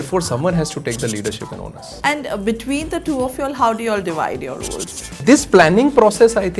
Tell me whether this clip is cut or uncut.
cut